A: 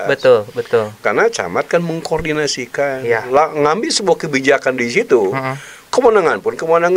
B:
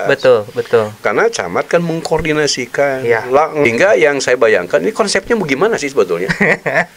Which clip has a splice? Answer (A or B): B